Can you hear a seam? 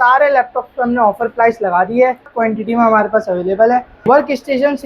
yes; 2 cuts; at 2.3 s, 4.1 s

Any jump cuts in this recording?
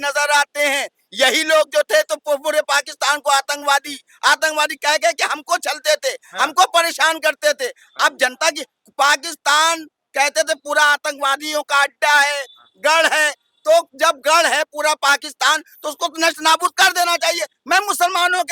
no; 0 cuts

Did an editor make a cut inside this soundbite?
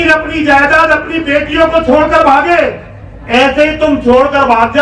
no; 0 cuts

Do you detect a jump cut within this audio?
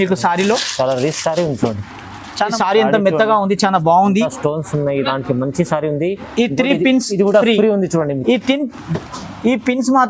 yes; 1 cut; at 2.5 s

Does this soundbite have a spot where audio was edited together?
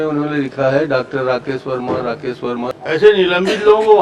yes; 1 cut; at 2.7 s

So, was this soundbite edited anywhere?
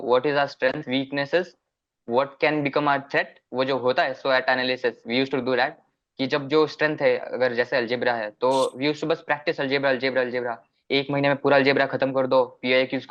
no; 0 cuts

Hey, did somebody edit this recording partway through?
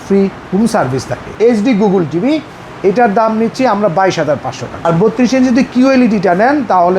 yes; 2 cuts; at 1.3 s, 4.9 s

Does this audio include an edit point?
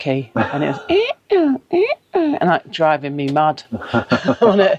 no; 0 cuts

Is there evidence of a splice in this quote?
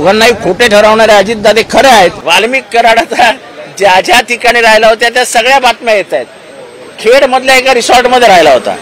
yes; 1 cut; at 2.2 s

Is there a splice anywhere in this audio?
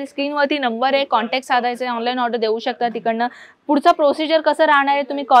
no; 0 cuts

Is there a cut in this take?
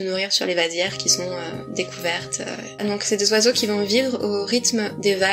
yes; 1 cut; at 2.8 s

